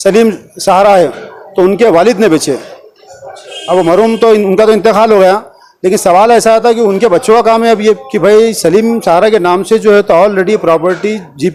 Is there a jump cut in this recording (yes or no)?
no